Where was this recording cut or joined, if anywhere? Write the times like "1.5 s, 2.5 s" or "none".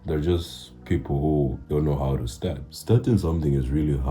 1.6 s, 2.7 s